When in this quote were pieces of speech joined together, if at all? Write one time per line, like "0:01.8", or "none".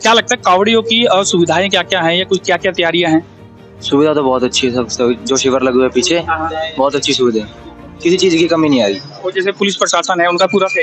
none